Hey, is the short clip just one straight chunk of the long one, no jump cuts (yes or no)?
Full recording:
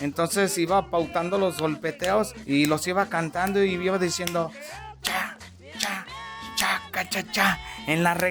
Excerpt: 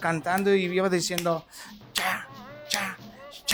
yes